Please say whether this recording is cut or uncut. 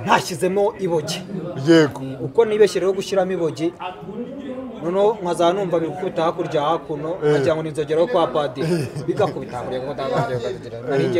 uncut